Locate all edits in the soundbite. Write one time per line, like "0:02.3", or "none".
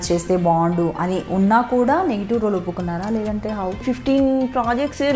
0:03.8